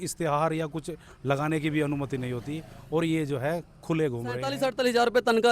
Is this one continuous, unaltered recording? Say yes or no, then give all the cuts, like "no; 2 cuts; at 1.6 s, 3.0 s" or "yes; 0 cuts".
no; 1 cut; at 4.6 s